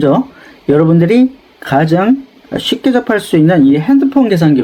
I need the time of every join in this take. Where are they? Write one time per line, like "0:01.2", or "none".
none